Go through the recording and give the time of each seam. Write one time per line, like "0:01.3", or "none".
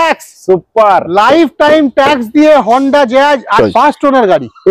0:03.5